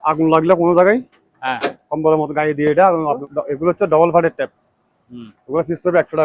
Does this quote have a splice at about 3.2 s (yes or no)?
yes